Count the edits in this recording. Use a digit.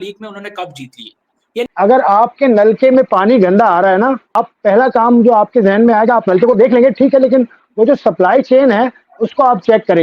2